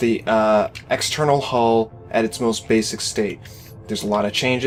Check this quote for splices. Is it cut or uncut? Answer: uncut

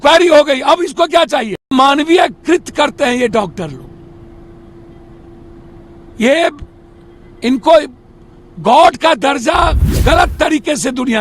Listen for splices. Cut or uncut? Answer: cut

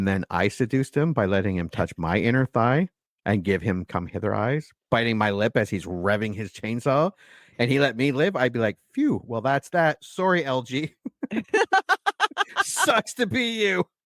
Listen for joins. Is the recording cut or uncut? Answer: uncut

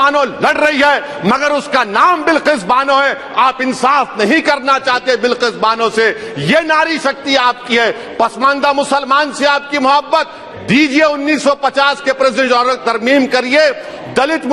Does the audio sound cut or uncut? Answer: uncut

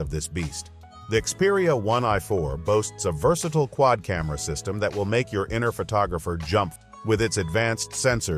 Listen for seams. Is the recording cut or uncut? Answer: cut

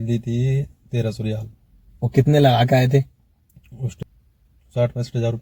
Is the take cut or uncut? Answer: cut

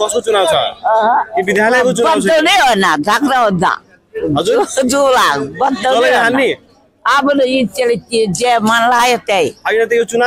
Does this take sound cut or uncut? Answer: uncut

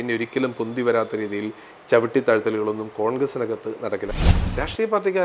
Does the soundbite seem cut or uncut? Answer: cut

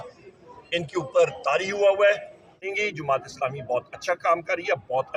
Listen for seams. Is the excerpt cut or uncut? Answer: cut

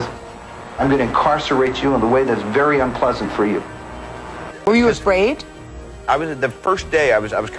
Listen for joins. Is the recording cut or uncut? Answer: cut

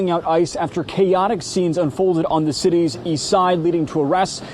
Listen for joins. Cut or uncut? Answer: uncut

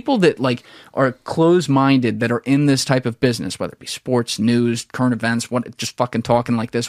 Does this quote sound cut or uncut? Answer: uncut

